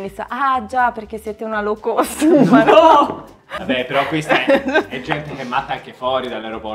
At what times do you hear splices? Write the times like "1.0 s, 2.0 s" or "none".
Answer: 3.6 s